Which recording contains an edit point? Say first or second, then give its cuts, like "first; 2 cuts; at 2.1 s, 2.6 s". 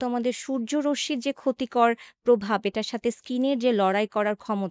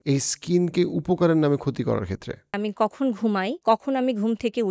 second; 2 cuts; at 2.6 s, 3.6 s